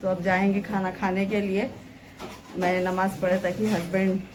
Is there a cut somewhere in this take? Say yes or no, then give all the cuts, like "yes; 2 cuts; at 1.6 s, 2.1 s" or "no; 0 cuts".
no; 0 cuts